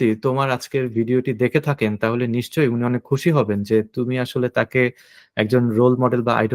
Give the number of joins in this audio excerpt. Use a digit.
0